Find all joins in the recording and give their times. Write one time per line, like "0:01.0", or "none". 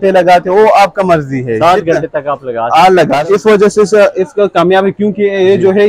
0:03.2

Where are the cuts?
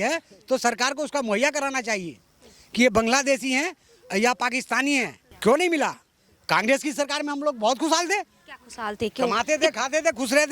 0:05.2

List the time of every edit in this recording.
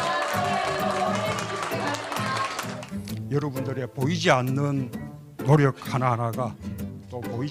0:05.5

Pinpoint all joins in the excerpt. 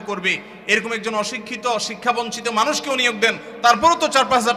none

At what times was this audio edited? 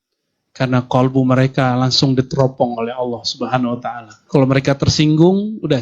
0:04.2

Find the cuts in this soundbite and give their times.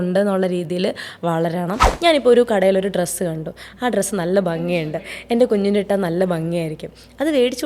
0:01.9

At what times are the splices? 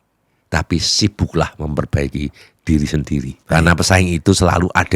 0:03.4

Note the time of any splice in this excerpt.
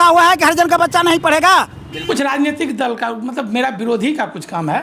0:02.0

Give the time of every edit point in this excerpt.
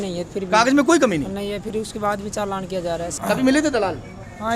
0:03.1

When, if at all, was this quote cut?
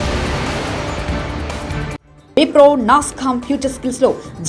0:02.1

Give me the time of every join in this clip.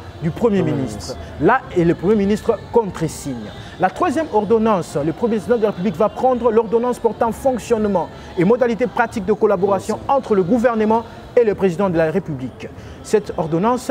none

